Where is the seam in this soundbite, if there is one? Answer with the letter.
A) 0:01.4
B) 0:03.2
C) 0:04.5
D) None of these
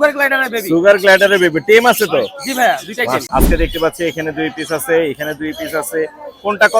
B